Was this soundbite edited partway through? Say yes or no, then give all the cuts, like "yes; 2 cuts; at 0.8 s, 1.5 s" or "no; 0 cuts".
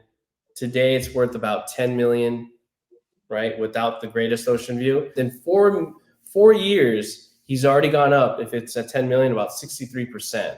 yes; 1 cut; at 5.1 s